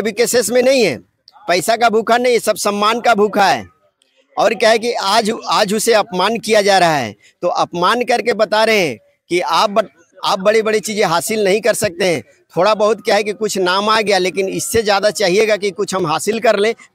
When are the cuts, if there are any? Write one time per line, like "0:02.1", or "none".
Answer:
none